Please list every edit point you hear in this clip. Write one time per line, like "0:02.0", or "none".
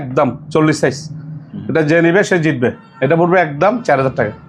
none

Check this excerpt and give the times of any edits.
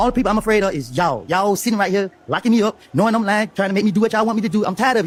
none

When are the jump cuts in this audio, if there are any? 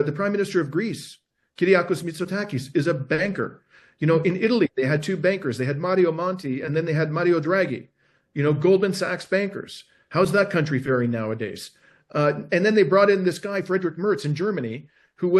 none

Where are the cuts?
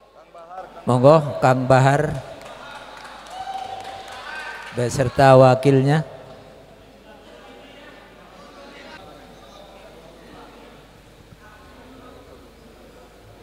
0:09.0

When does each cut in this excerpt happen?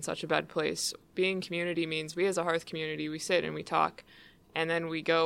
0:00.9

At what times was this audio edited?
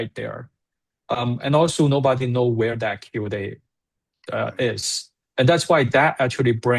none

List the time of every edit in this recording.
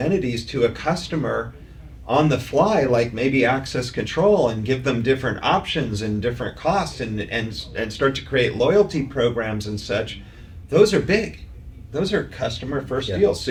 none

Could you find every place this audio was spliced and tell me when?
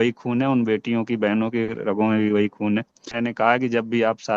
0:03.1

